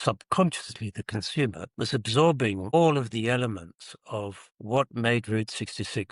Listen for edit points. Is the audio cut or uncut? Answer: cut